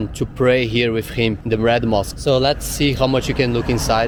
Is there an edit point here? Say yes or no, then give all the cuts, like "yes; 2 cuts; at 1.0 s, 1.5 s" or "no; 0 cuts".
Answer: no; 0 cuts